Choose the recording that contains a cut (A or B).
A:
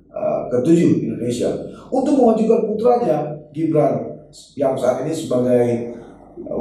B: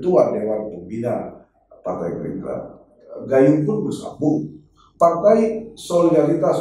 B